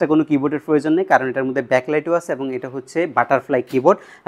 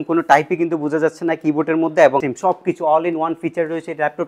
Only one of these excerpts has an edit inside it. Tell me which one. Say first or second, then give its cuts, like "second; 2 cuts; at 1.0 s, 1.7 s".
second; 1 cut; at 2.3 s